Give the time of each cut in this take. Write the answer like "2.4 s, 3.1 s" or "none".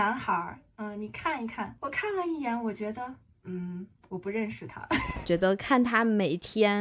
1.7 s, 5.2 s